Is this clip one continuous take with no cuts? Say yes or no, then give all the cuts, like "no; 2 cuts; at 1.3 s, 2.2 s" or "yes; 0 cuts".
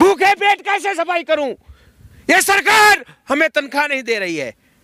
yes; 0 cuts